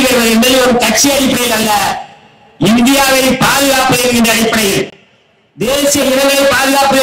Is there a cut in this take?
no; 0 cuts

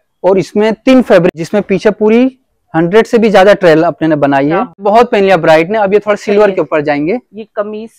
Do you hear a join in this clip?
yes; 2 cuts; at 1.3 s, 4.8 s

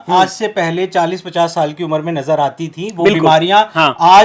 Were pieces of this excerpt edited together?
no; 0 cuts

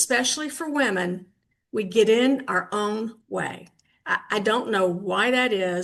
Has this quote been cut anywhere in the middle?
no; 0 cuts

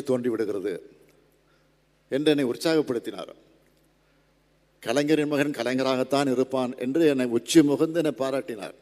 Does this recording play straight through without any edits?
yes; 0 cuts

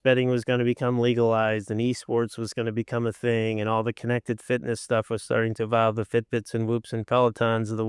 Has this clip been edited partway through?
no; 0 cuts

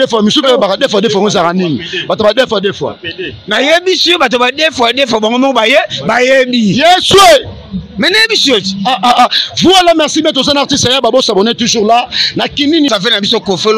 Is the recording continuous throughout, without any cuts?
no; 1 cut; at 12.9 s

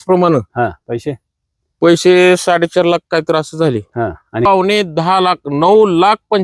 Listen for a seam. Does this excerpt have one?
yes; 1 cut; at 4.5 s

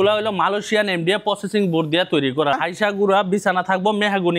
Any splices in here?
yes; 1 cut; at 2.6 s

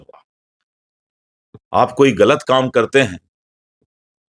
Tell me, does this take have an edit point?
no; 0 cuts

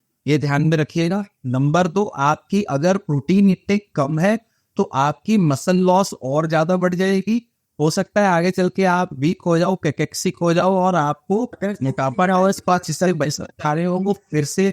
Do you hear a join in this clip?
no; 0 cuts

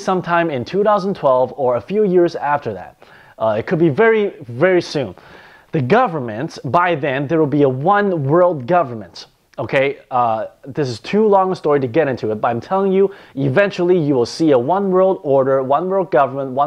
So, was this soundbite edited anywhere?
yes; 1 cut; at 4.9 s

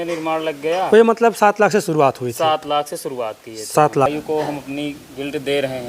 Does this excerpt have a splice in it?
yes; 1 cut; at 4.1 s

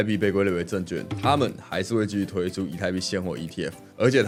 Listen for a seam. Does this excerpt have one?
no; 0 cuts

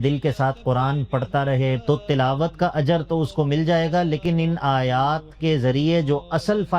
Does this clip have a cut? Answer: yes; 1 cut; at 1.8 s

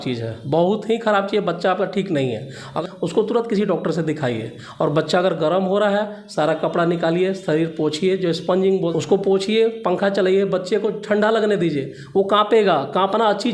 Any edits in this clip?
yes; 2 cuts; at 2.8 s, 8.9 s

